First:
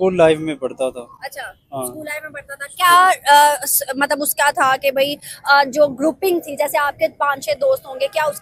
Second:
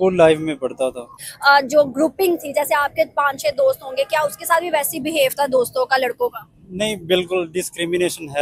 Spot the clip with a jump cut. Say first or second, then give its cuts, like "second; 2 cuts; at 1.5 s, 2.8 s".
second; 1 cut; at 1.2 s